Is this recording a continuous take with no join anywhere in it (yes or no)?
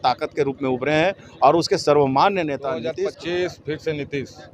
no